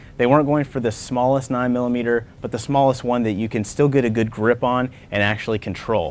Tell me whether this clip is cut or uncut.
uncut